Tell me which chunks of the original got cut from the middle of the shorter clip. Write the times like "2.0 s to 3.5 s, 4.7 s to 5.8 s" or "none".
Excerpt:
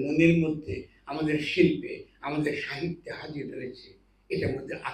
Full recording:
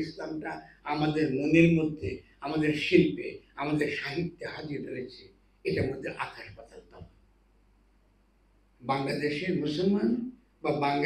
none